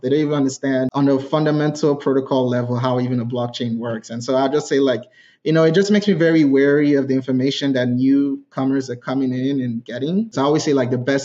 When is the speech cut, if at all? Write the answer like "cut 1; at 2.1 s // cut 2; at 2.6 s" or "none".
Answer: cut 1; at 0.9 s // cut 2; at 10.3 s